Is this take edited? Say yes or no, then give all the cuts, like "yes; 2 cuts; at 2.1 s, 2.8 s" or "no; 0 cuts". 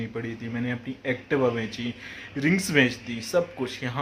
no; 0 cuts